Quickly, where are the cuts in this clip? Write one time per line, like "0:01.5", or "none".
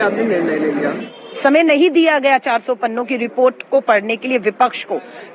0:01.1